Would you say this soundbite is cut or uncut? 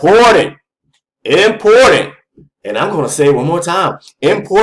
uncut